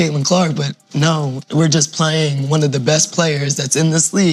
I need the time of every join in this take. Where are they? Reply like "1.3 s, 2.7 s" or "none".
none

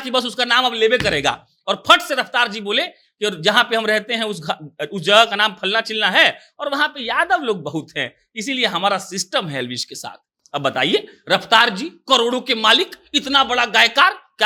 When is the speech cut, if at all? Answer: none

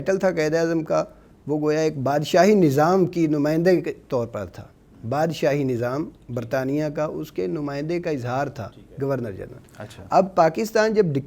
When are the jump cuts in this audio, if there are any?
none

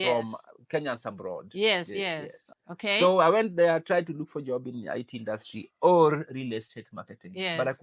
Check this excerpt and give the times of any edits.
2.4 s

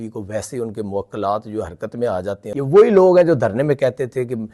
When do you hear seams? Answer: 2.4 s

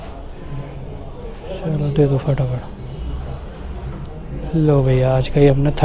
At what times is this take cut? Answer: none

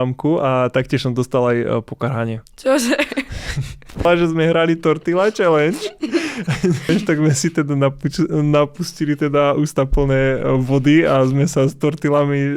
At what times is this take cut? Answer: 4.0 s, 6.9 s

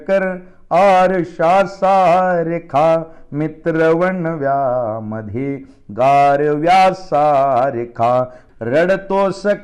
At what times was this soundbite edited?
8.4 s

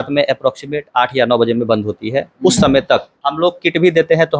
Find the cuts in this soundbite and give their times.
3.2 s

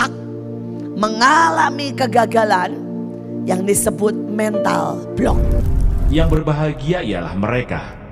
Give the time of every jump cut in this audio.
5.5 s

